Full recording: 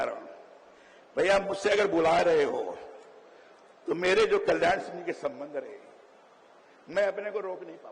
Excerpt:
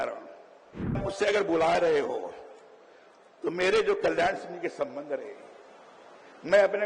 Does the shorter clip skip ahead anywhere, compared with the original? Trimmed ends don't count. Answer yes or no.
yes